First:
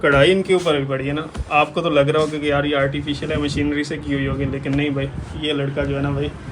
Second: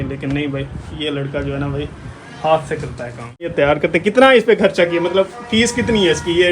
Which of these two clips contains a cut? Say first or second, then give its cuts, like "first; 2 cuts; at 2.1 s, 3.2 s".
second; 1 cut; at 3.5 s